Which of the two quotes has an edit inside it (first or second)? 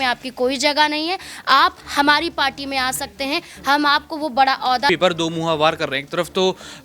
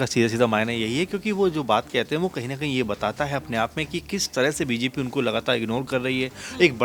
first